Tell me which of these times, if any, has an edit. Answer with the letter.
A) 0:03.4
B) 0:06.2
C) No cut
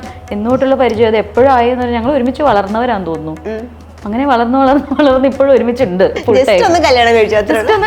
B